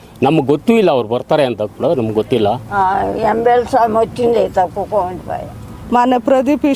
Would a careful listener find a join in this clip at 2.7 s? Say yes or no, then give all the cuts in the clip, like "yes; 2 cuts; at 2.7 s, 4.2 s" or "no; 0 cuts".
yes; 2 cuts; at 2.7 s, 5.7 s